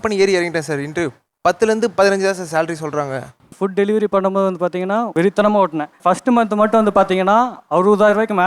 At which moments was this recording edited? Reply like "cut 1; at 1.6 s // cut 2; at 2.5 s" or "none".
cut 1; at 3.5 s